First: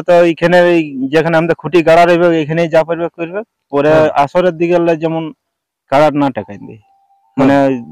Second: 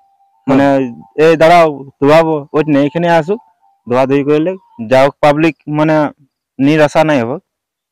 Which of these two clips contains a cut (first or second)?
second